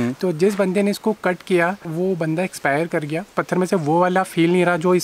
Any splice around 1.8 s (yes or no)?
yes